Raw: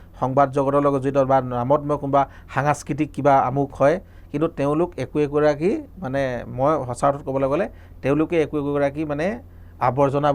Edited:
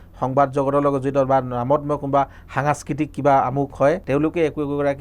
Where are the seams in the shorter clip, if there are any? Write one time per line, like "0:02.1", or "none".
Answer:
0:04.0